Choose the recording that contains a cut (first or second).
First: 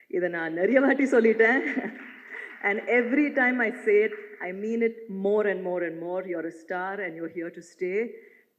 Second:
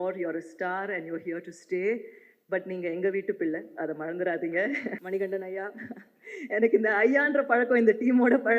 second